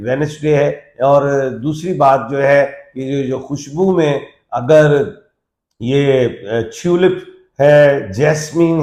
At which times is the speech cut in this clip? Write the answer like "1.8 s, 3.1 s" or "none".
none